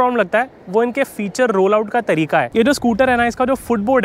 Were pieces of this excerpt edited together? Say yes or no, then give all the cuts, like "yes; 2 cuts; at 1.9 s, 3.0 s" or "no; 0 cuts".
yes; 1 cut; at 2.5 s